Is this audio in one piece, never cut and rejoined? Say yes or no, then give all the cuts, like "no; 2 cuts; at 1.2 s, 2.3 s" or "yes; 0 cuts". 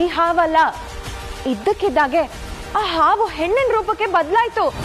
yes; 0 cuts